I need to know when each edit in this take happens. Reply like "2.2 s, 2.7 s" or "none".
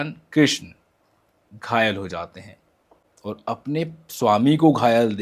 none